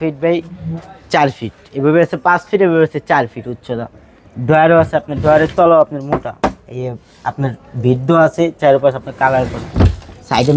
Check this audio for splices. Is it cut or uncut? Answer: uncut